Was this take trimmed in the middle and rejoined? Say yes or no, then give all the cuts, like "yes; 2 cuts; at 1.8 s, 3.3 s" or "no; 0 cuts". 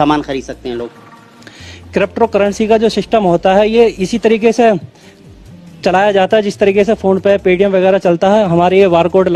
no; 0 cuts